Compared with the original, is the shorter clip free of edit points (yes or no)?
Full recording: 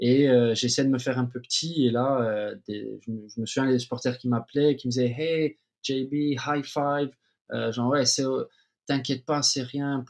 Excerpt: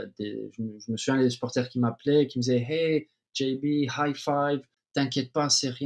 no